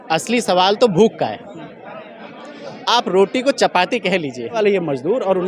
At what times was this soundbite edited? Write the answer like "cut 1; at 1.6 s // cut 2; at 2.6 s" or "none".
cut 1; at 4.6 s